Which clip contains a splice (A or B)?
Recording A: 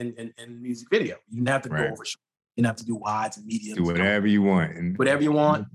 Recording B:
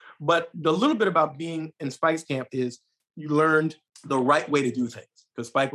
B